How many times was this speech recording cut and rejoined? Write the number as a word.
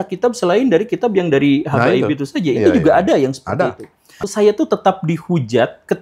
one